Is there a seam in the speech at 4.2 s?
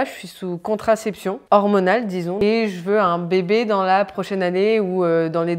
yes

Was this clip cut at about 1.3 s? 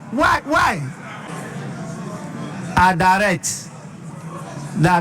yes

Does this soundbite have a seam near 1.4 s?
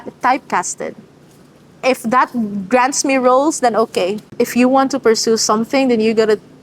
no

